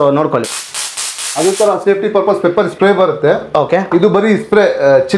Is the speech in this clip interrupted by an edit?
no; 0 cuts

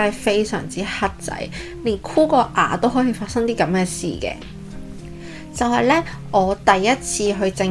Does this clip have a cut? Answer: no; 0 cuts

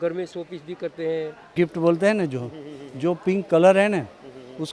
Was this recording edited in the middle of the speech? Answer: yes; 1 cut; at 1.5 s

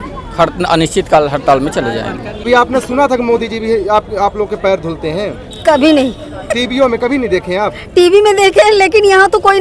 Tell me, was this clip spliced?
yes; 1 cut; at 2.5 s

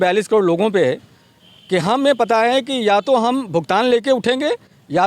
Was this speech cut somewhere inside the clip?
no; 0 cuts

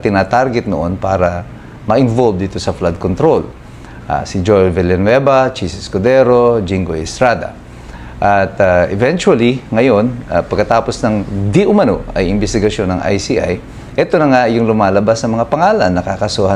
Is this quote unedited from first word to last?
yes; 0 cuts

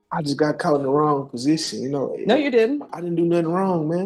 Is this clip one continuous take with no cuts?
yes; 0 cuts

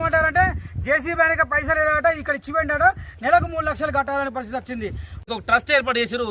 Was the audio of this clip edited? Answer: yes; 1 cut; at 5.2 s

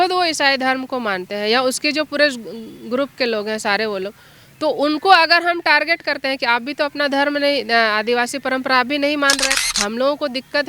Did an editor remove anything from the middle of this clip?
yes; 1 cut; at 9.6 s

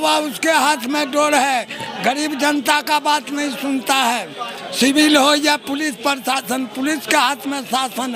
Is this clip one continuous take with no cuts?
yes; 0 cuts

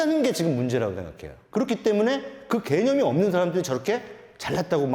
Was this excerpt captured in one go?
no; 1 cut; at 1.3 s

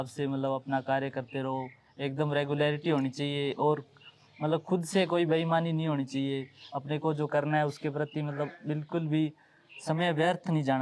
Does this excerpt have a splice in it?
no; 0 cuts

